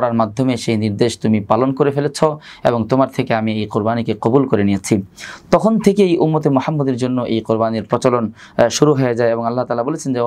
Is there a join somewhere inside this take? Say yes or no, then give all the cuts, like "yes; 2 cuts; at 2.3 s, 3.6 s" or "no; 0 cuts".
no; 0 cuts